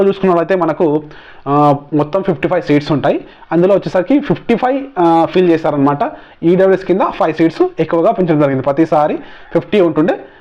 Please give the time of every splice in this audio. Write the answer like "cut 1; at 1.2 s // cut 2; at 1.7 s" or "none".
none

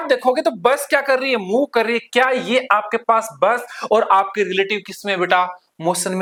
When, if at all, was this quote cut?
none

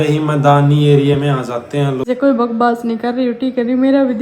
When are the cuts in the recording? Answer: cut 1; at 2.0 s

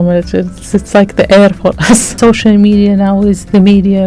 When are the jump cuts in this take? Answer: cut 1; at 2.1 s

